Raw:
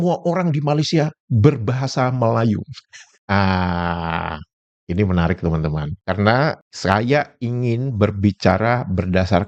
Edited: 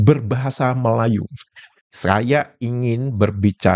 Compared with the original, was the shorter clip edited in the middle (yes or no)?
yes